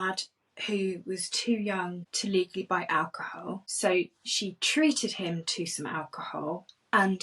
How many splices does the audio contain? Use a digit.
2